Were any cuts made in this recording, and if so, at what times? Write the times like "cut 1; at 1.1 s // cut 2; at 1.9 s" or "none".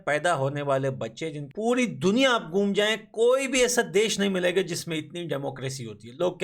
cut 1; at 1.4 s